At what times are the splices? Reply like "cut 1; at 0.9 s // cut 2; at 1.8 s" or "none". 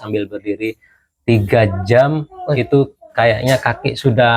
none